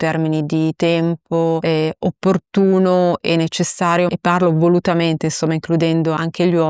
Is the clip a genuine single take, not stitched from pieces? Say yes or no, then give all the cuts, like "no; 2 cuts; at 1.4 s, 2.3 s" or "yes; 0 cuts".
no; 2 cuts; at 1.6 s, 4.1 s